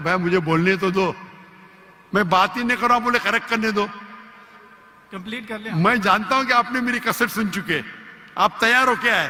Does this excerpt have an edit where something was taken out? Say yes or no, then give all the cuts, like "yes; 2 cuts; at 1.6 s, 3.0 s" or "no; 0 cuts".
no; 0 cuts